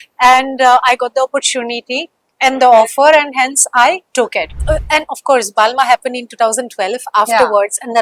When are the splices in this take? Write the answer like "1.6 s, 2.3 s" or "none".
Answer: 4.6 s